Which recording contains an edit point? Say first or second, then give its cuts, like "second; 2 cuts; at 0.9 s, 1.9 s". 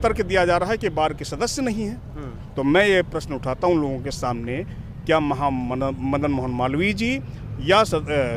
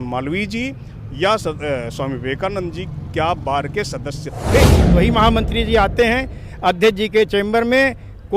second; 1 cut; at 4.9 s